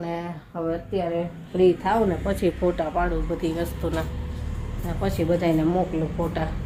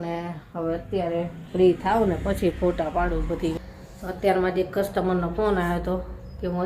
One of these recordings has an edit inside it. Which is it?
second; 1 cut; at 3.6 s

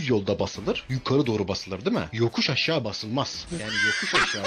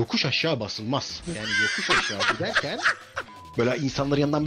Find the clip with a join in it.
second; 1 cut; at 3.4 s

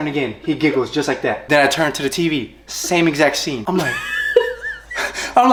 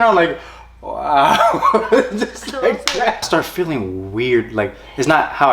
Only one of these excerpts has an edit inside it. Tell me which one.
second; 1 cut; at 3.3 s

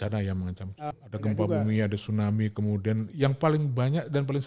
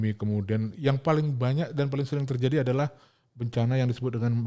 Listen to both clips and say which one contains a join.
first; 1 cut; at 0.9 s

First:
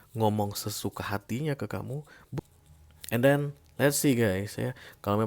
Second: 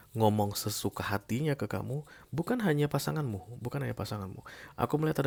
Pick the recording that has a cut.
first; 1 cut; at 2.2 s

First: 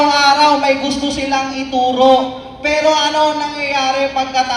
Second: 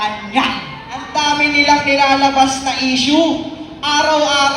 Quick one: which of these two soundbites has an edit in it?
second; 1 cut; at 1.3 s

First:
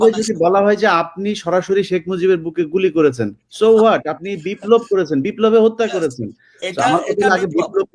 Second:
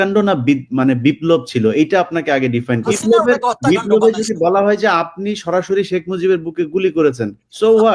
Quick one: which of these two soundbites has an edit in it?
second; 1 cut; at 3.0 s

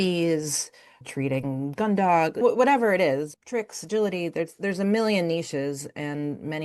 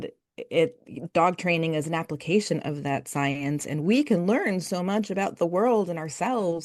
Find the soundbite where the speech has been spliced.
first; 3 cuts; at 1.0 s, 2.4 s, 3.4 s

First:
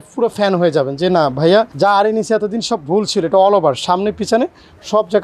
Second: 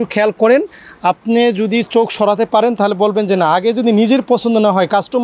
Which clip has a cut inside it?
first; 1 cut; at 1.7 s

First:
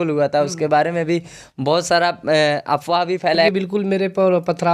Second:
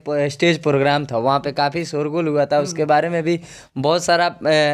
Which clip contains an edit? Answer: first; 1 cut; at 3.5 s

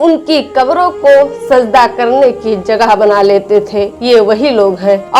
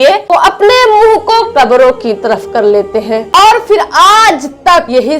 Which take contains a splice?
second; 1 cut; at 3.3 s

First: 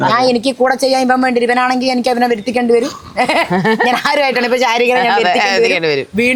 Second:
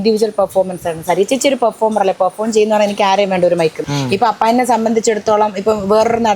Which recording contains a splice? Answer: second; 1 cut; at 3.8 s

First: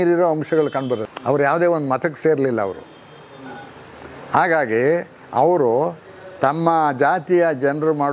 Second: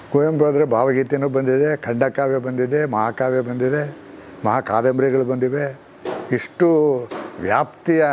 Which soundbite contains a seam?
first; 1 cut; at 1.1 s

